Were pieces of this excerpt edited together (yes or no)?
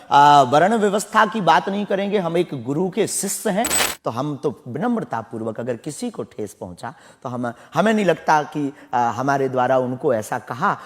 yes